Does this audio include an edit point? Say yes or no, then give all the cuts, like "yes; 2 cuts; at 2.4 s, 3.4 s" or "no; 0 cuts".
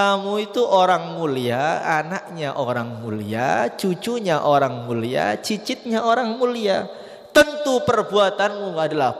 no; 0 cuts